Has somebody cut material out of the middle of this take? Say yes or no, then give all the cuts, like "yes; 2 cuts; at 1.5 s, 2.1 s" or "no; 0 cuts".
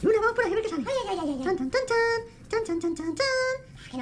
no; 0 cuts